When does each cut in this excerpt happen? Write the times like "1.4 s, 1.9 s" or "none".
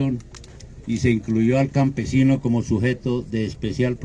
none

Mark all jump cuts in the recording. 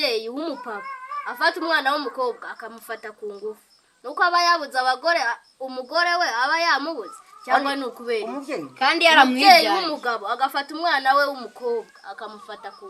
none

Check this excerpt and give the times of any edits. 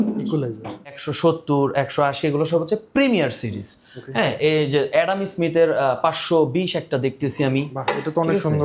1.0 s

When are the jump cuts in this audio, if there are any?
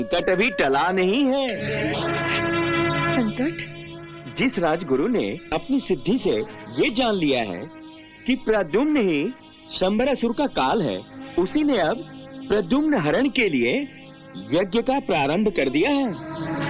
none

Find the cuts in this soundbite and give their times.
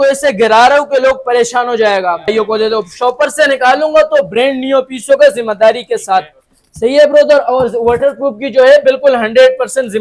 2.3 s

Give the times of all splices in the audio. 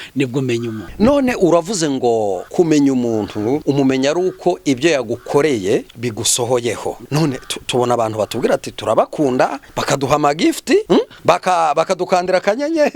0.8 s, 2.4 s, 3.6 s, 5.9 s, 7.0 s, 9.7 s, 11.0 s

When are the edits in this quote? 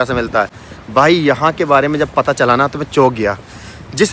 none

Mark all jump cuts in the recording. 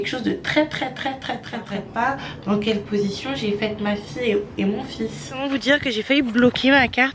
1.8 s, 5.4 s

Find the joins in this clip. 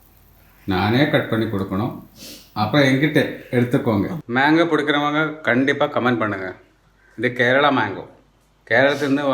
4.2 s

